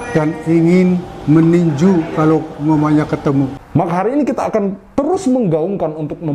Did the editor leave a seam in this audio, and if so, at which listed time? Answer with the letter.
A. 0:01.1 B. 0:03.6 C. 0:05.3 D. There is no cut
B